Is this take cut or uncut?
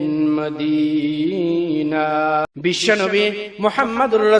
cut